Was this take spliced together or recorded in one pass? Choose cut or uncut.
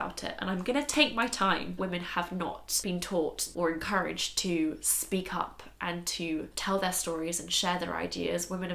cut